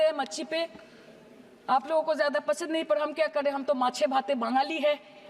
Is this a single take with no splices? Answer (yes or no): yes